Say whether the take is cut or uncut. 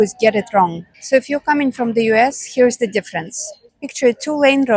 uncut